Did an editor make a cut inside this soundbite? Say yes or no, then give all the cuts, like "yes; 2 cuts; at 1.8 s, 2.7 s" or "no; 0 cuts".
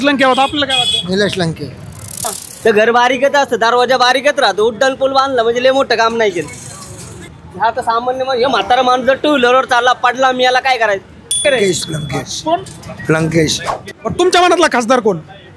yes; 4 cuts; at 2.2 s, 7.4 s, 11.4 s, 13.9 s